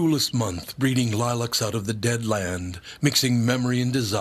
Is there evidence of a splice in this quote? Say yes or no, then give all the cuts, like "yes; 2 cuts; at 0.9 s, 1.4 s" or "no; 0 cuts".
no; 0 cuts